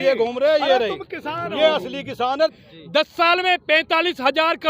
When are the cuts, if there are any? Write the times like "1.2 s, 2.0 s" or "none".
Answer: 2.4 s